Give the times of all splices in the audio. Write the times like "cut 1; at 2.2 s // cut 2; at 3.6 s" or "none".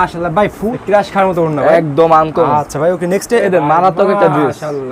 cut 1; at 0.7 s // cut 2; at 3.4 s